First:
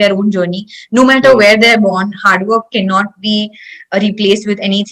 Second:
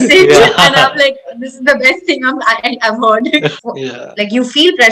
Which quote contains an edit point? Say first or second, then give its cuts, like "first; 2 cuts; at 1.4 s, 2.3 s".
second; 1 cut; at 3.5 s